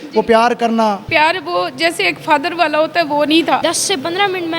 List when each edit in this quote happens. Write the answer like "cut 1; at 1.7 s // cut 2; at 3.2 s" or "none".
cut 1; at 1.0 s // cut 2; at 3.6 s